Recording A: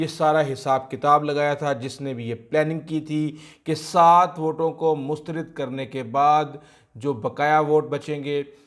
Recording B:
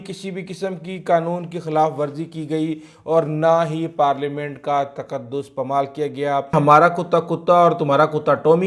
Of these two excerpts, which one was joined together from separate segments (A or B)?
B